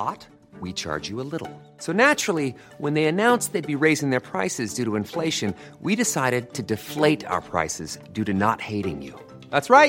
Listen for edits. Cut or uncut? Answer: uncut